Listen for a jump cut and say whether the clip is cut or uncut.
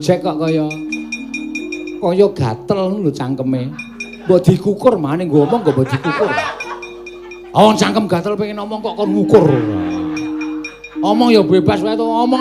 uncut